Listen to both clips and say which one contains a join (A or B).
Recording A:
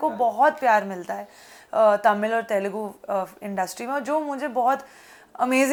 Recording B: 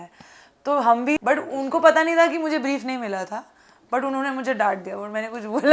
B